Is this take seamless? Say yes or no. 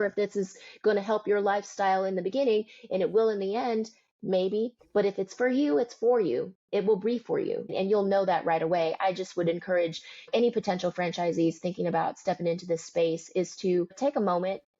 no